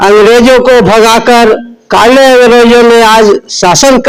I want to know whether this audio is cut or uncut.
uncut